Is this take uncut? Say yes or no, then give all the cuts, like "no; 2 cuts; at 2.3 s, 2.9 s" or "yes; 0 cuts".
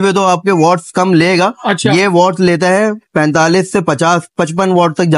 yes; 0 cuts